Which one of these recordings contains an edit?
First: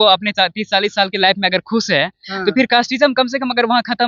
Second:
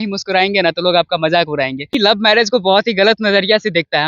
second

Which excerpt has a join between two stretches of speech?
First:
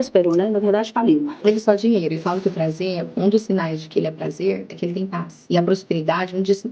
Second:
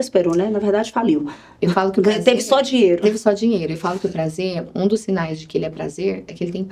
first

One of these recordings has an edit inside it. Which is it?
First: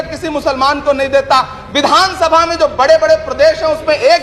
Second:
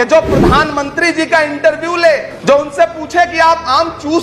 second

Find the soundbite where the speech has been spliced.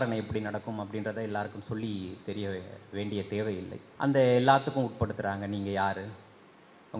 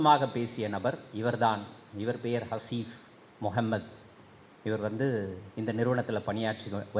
first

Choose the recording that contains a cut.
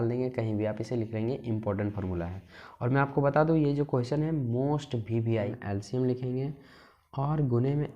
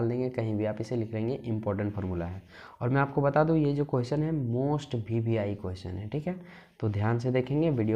first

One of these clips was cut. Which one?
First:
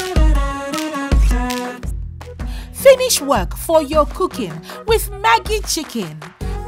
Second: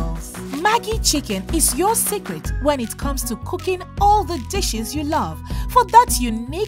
first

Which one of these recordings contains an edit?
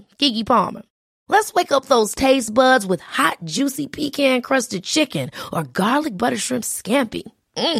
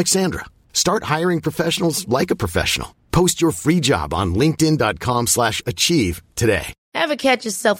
second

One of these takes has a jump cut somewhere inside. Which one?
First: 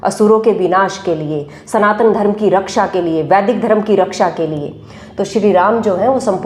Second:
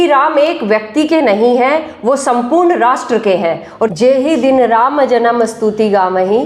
second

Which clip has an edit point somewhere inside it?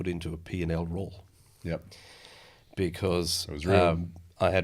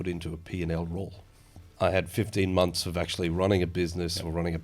second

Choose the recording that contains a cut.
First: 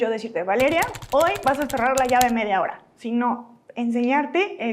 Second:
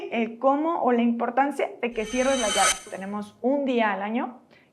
second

